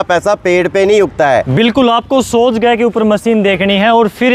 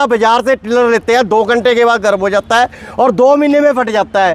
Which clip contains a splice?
first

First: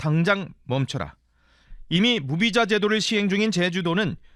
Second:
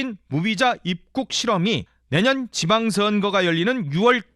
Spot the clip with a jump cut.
second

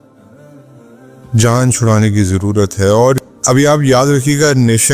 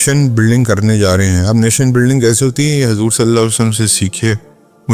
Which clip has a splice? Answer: first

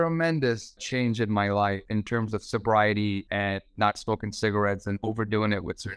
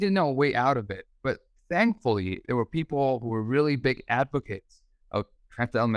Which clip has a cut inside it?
first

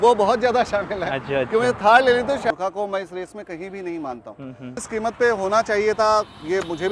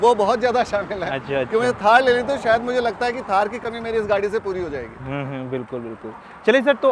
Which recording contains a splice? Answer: first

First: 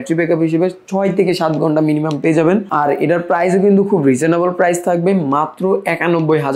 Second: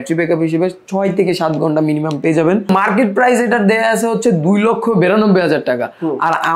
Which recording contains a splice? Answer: second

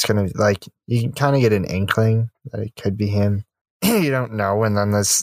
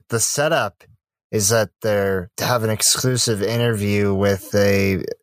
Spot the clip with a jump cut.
first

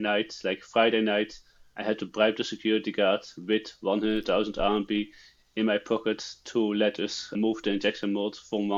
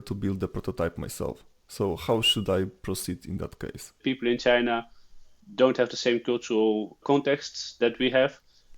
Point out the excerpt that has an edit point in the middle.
second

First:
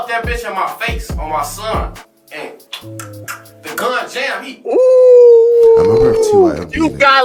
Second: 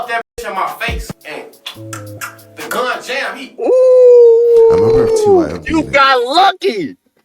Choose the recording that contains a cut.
second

